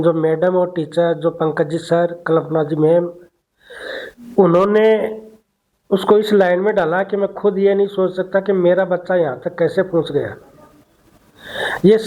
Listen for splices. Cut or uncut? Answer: uncut